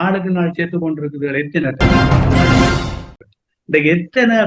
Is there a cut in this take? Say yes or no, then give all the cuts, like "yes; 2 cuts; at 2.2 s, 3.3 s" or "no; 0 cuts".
yes; 2 cuts; at 1.7 s, 3.1 s